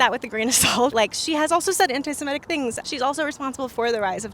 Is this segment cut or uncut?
cut